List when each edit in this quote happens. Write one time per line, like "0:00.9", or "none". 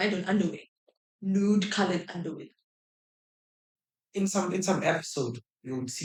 none